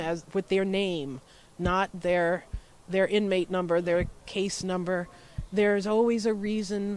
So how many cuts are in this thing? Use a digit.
0